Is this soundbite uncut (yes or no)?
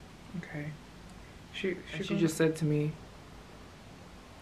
no